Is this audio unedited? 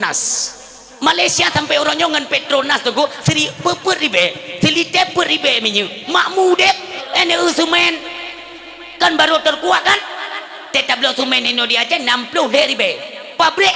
no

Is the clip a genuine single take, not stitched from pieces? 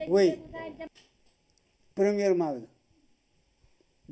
yes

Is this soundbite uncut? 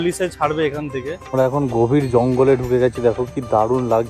no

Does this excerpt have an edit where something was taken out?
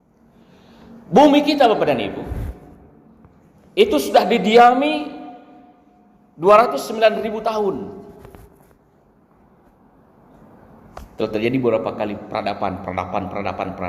no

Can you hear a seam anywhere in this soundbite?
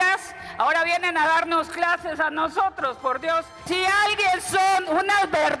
yes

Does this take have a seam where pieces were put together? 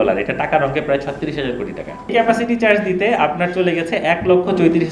yes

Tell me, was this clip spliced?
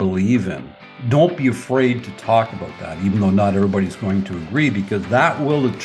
yes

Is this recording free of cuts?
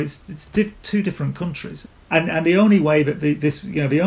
yes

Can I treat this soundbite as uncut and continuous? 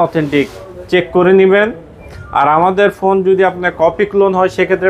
yes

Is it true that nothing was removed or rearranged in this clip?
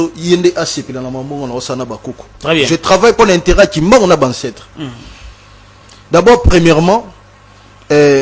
yes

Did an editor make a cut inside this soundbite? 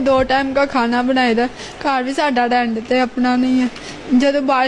no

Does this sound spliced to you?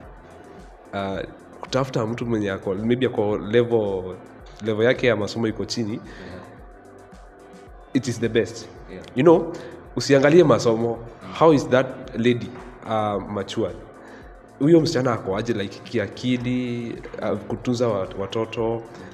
no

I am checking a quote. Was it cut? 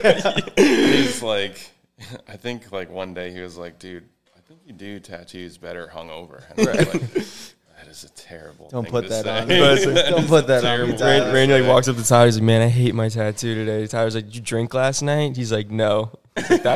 no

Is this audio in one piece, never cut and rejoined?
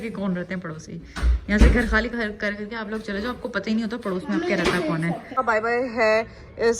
no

